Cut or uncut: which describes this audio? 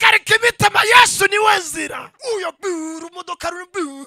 cut